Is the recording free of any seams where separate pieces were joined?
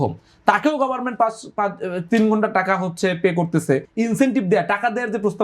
no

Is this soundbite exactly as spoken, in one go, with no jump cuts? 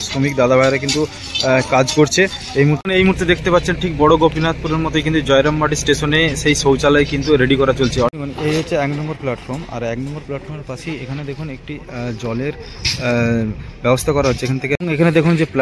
no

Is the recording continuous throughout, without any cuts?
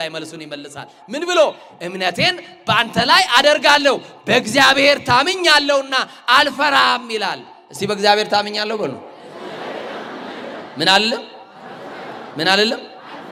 yes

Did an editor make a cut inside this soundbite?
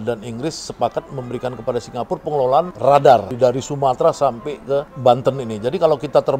yes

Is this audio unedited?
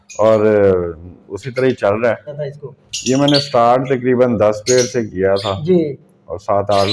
no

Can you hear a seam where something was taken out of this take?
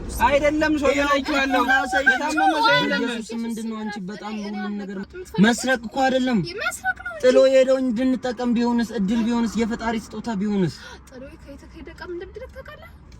yes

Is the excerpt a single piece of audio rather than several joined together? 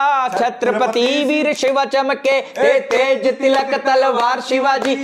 yes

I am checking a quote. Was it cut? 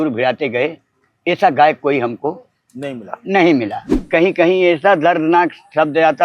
yes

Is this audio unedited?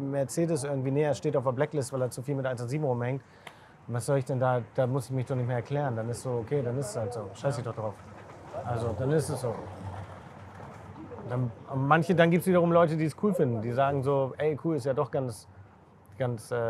yes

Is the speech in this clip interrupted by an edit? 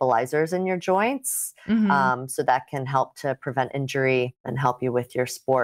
yes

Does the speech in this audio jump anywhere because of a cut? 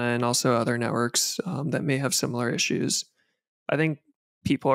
no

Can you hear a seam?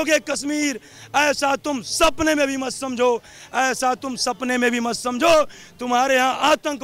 no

